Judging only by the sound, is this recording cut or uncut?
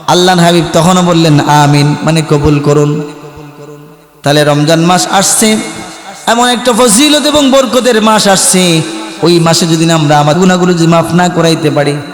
cut